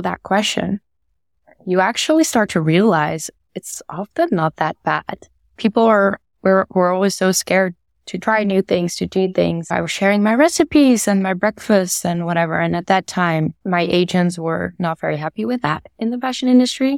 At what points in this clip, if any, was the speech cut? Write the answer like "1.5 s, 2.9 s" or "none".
5.5 s, 9.7 s, 13.6 s